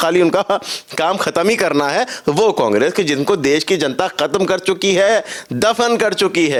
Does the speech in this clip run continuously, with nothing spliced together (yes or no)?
yes